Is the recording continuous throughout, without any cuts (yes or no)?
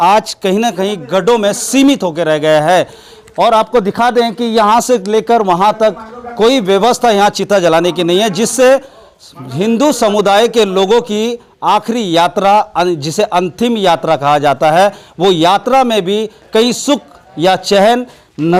yes